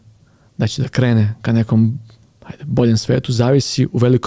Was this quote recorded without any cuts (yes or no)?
yes